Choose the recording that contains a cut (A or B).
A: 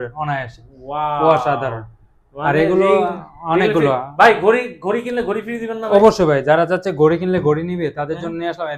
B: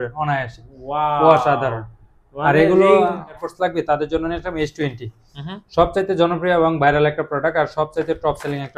B